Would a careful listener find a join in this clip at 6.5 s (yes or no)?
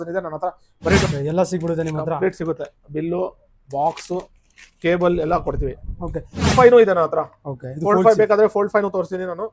yes